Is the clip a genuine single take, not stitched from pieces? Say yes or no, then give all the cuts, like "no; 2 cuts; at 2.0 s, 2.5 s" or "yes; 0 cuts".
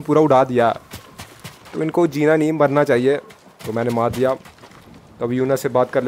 yes; 0 cuts